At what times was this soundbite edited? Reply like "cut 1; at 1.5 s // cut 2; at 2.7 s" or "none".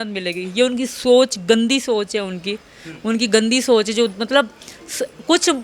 none

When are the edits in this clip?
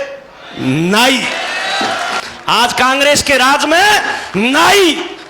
cut 1; at 2.2 s

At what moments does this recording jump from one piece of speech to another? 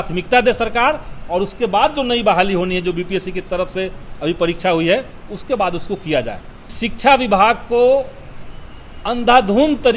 cut 1; at 6.7 s

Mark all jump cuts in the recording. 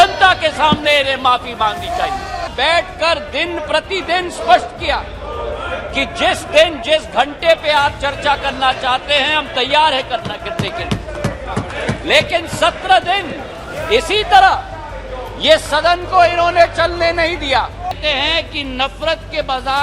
cut 1; at 2.5 s // cut 2; at 17.9 s

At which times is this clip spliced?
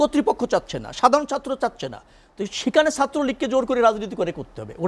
none

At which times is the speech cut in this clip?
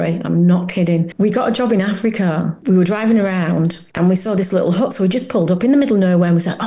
cut 1; at 1.1 s // cut 2; at 2.6 s // cut 3; at 3.8 s

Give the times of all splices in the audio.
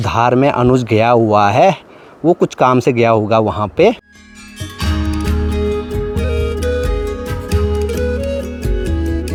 none

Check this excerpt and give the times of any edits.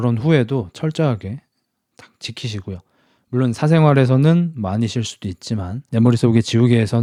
none

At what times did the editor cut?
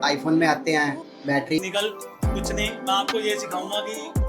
cut 1; at 1.6 s

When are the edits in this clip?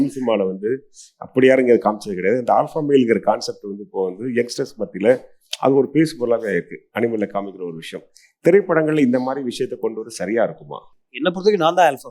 cut 1; at 11.2 s

